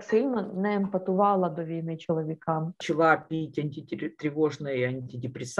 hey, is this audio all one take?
no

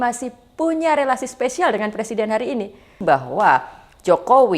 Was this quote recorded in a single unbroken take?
no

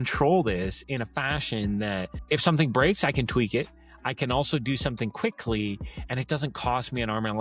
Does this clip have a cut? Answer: yes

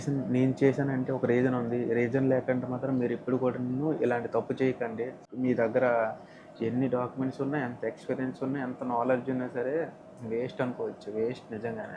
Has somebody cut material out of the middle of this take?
yes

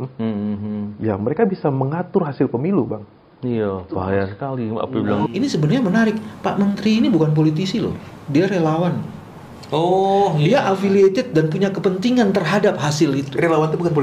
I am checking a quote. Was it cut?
yes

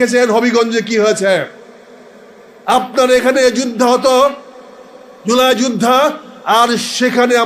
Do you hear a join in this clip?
no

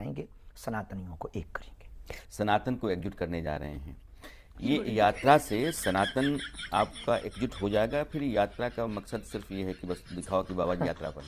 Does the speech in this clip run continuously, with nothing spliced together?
yes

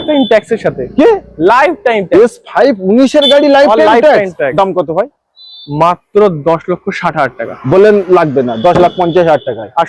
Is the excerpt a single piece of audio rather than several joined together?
yes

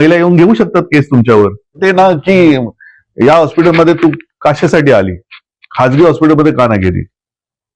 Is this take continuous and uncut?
no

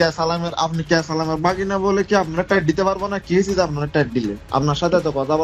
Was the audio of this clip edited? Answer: yes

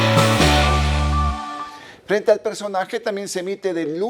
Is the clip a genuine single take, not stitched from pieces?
yes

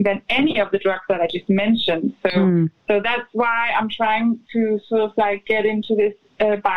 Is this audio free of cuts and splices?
yes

